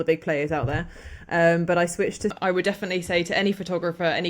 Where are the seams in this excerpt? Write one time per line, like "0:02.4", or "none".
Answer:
0:02.3

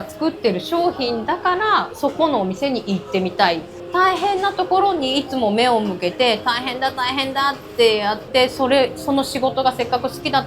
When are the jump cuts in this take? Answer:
0:03.8

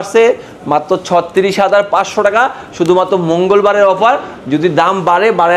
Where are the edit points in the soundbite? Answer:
none

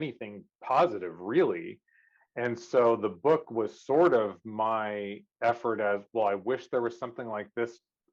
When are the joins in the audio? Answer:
none

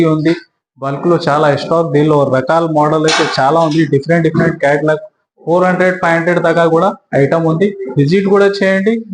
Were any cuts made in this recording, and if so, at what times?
none

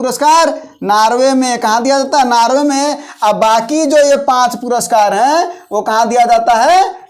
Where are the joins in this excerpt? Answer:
none

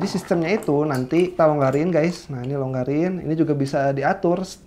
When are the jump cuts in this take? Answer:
0:01.4

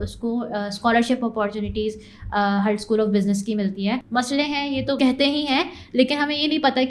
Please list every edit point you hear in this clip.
0:04.0
0:05.0

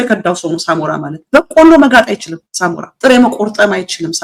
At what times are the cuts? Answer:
none

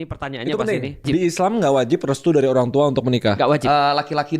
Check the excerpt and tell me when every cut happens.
0:01.1

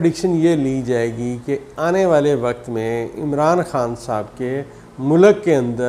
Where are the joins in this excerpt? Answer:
none

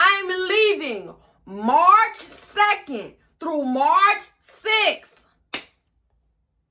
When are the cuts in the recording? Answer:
none

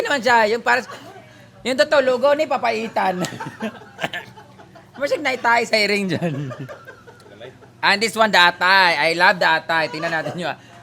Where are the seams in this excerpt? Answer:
none

